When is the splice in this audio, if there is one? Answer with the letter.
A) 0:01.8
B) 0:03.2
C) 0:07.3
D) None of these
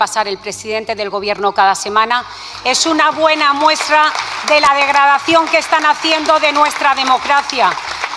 D